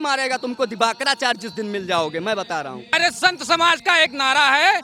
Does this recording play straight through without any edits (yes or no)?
no